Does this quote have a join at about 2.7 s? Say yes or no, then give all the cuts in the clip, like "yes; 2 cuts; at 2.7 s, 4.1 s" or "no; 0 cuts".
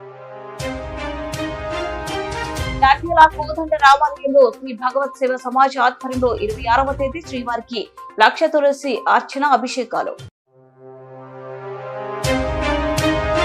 yes; 1 cut; at 2.7 s